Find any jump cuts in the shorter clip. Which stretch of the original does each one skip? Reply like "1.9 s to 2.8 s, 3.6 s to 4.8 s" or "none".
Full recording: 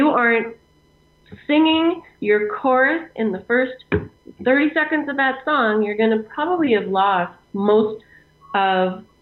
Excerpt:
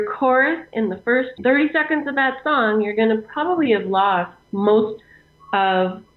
3.8 s to 4.3 s

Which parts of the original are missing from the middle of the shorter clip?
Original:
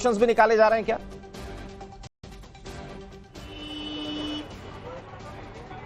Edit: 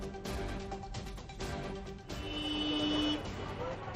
2.1 s to 2.2 s

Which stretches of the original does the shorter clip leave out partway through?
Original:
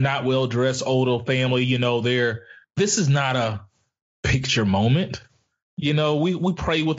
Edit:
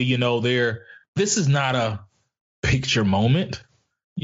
none

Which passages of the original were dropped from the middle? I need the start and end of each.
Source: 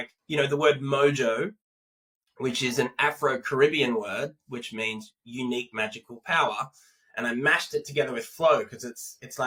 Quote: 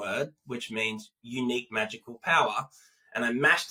none

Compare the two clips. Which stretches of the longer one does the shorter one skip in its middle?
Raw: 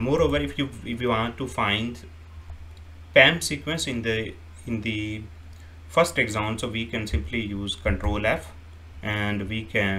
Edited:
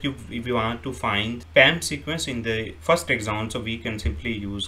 2.0 s to 3.0 s, 4.3 s to 5.8 s

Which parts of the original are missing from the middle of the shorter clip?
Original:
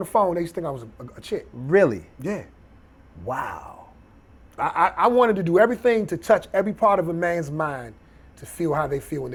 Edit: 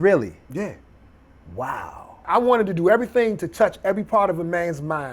3.9 s to 4.9 s

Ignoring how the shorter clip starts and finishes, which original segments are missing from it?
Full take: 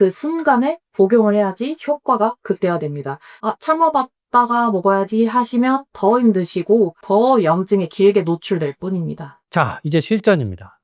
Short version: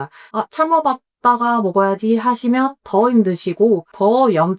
none

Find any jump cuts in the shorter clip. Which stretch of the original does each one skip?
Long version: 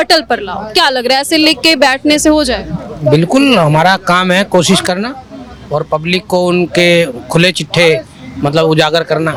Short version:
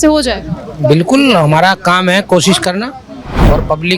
none

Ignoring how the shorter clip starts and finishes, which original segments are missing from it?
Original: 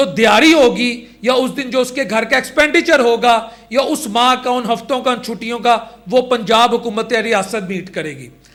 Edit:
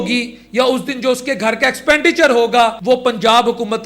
3.5 s to 6.0 s

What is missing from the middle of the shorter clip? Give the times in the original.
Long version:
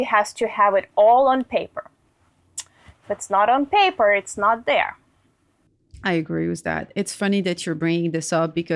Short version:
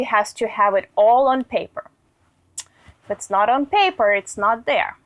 none

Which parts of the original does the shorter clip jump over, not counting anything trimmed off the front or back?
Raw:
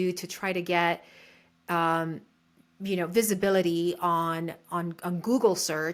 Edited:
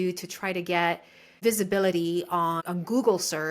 1.4 s to 3.1 s, 4.3 s to 5.0 s

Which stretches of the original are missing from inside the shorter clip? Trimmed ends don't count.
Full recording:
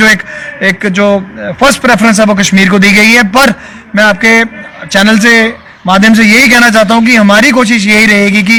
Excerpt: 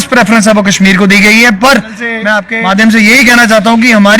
4.2 s to 5.7 s

